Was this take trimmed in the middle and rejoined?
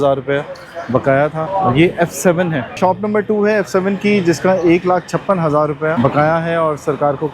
yes; 3 cuts; at 1.4 s, 2.8 s, 5.9 s

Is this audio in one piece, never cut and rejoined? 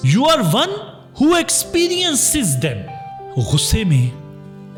yes; 0 cuts

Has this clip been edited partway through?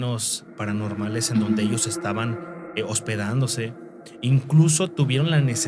no; 0 cuts

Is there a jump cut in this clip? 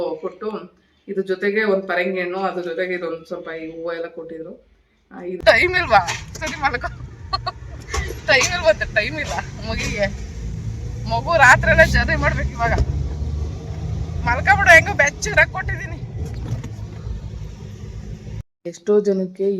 yes; 2 cuts; at 5.4 s, 18.2 s

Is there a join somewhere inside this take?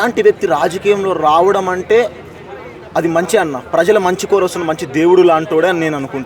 no; 0 cuts

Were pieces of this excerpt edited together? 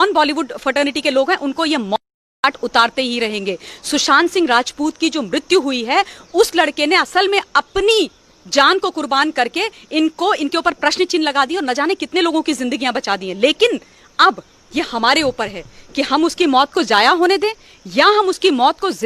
no; 0 cuts

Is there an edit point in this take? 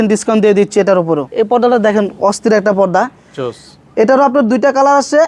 yes; 1 cut; at 1.3 s

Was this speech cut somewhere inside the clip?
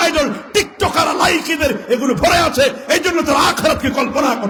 no; 0 cuts

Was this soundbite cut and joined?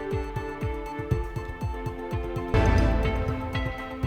no; 0 cuts

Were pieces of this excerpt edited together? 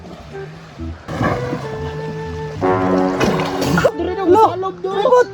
yes; 2 cuts; at 1.1 s, 3.9 s

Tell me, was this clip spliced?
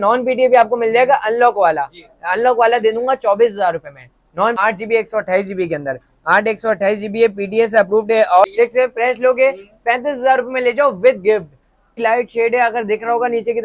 yes; 3 cuts; at 4.6 s, 8.4 s, 11.9 s

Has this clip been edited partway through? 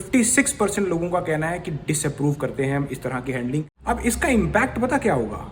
yes; 1 cut; at 3.7 s

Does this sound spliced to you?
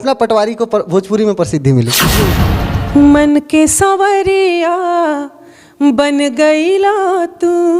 yes; 1 cut; at 2.4 s

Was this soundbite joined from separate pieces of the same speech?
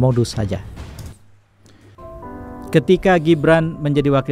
yes; 1 cut; at 2.0 s

